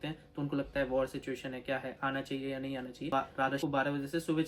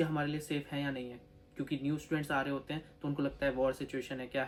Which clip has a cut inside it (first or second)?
first